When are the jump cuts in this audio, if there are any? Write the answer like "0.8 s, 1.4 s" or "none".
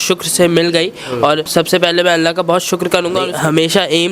1.4 s, 3.3 s